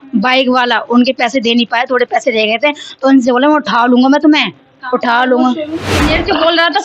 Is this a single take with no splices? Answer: no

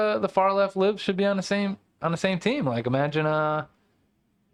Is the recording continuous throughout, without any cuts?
yes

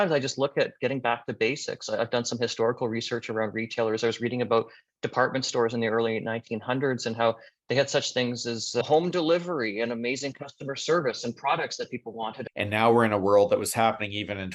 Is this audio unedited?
no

